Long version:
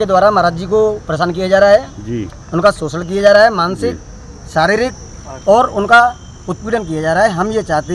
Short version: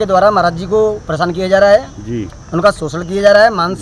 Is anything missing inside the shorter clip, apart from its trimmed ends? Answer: no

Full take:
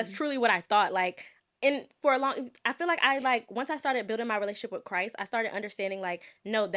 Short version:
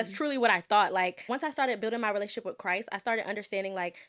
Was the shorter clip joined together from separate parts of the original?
yes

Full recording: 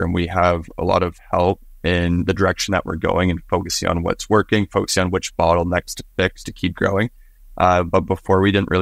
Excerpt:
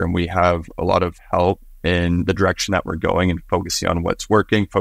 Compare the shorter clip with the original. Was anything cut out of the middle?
no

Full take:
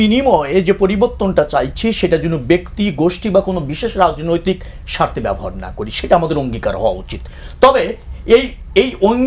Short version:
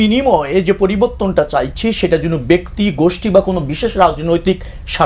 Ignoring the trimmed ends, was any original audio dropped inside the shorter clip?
no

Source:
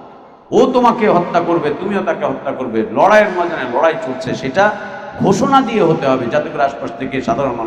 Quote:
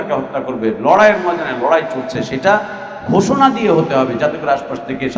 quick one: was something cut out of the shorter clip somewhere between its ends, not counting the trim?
no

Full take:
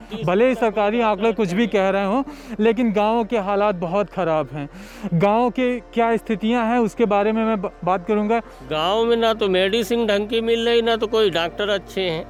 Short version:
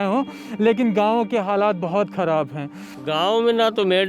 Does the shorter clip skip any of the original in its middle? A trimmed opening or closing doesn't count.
yes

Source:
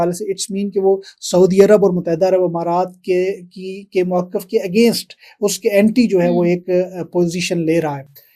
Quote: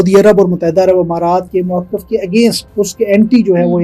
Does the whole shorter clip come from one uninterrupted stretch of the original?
no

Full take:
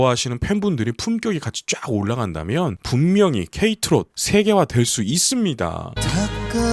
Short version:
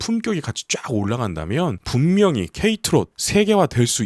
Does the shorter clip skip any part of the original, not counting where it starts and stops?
no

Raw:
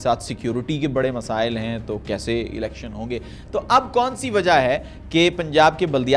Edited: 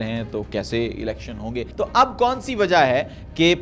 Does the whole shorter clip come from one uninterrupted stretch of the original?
no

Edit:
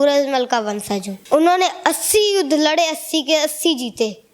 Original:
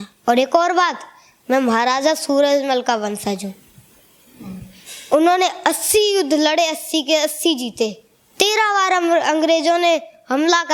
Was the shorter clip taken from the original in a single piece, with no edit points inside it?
no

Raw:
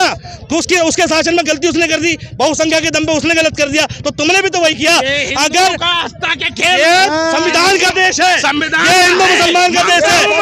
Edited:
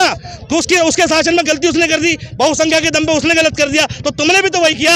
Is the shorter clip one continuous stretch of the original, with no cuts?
yes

